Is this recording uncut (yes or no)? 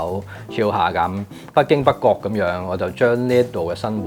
no